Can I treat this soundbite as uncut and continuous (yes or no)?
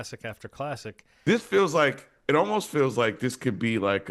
no